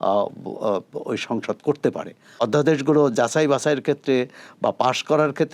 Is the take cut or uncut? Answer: cut